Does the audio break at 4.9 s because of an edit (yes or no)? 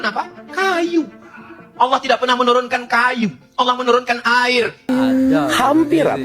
yes